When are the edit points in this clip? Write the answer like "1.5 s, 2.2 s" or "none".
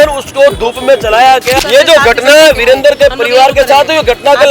1.5 s